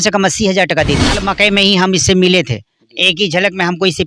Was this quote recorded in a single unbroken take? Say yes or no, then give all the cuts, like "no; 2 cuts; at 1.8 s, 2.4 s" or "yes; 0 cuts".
no; 1 cut; at 1.3 s